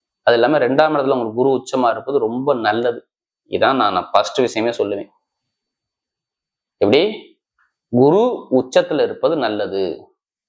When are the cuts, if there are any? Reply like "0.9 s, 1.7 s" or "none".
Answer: none